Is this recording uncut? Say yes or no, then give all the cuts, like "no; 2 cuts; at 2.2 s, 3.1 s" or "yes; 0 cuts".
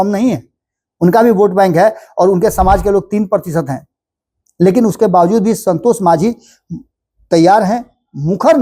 yes; 0 cuts